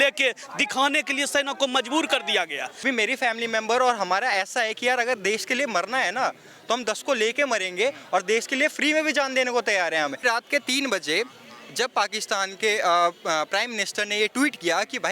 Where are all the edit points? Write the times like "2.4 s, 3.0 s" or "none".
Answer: 2.8 s, 10.2 s